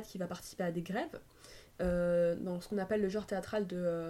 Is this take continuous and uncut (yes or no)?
yes